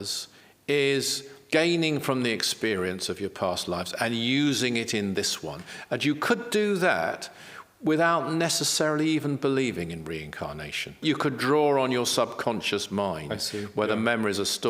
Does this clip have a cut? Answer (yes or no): yes